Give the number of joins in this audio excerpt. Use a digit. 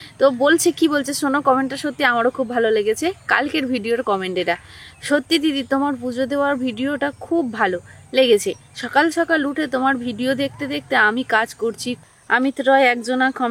1